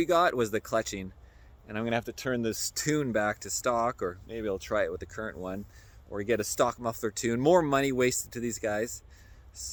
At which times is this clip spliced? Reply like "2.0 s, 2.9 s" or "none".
none